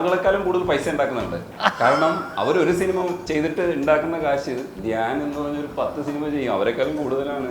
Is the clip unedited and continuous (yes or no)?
no